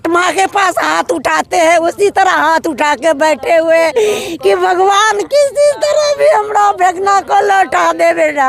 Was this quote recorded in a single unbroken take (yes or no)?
yes